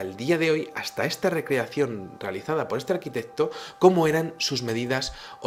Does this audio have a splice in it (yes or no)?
no